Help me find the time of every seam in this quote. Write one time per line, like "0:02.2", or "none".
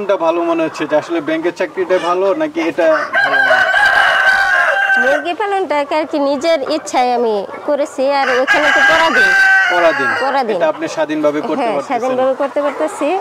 none